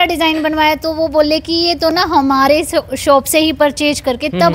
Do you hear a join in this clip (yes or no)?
no